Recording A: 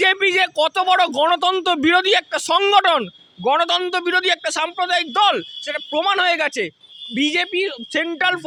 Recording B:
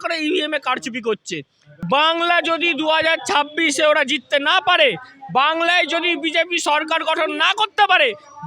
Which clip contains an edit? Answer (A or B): B